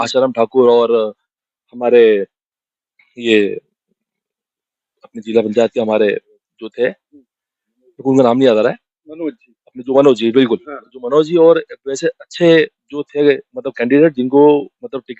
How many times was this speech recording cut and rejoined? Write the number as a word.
zero